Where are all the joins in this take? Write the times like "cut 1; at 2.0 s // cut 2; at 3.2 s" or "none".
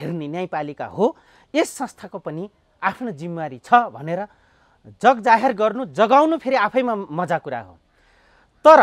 none